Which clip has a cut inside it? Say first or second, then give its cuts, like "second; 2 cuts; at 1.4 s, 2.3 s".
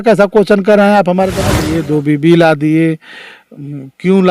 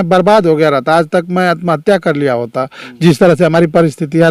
first; 1 cut; at 1.6 s